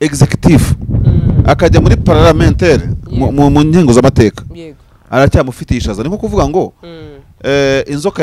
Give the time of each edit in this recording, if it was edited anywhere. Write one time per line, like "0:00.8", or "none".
none